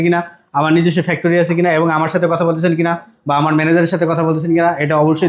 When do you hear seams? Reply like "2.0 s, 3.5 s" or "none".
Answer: none